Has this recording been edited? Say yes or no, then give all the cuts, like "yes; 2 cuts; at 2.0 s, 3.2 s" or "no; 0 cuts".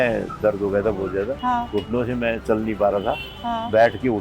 yes; 1 cut; at 1.4 s